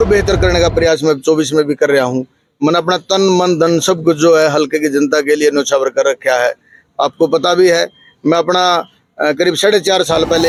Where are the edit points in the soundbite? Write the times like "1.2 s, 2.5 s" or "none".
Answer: none

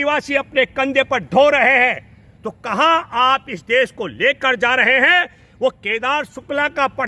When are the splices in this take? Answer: none

